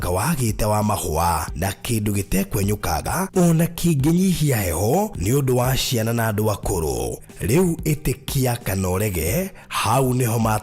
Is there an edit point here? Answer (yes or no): yes